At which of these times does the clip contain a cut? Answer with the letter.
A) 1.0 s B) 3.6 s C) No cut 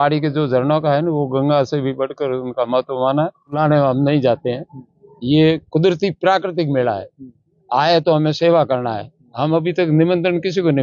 B